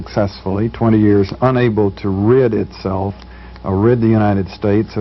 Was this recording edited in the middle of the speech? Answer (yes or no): yes